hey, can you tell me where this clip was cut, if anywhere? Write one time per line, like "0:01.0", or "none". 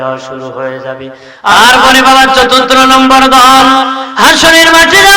0:01.5